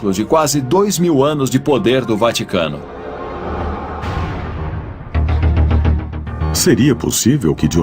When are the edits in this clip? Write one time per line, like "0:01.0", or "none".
0:05.7